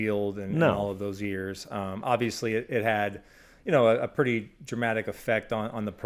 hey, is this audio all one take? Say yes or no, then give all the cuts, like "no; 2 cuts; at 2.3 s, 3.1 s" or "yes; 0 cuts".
yes; 0 cuts